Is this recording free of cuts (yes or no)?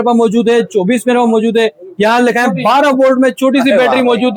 yes